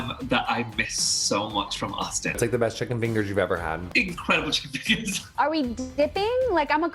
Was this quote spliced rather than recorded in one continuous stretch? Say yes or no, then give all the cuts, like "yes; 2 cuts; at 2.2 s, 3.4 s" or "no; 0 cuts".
yes; 3 cuts; at 2.4 s, 3.8 s, 5.2 s